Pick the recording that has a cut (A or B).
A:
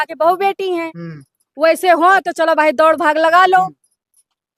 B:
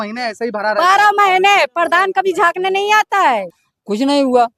B